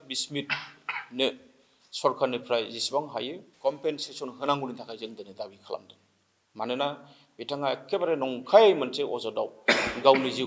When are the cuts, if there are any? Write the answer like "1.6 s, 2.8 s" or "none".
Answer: 3.4 s